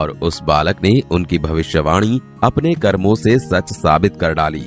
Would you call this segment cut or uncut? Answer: cut